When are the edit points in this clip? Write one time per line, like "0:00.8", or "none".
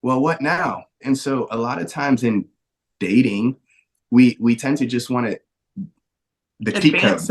0:01.0